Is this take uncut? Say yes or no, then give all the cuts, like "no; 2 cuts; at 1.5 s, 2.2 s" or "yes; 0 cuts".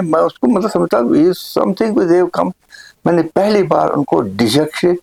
yes; 0 cuts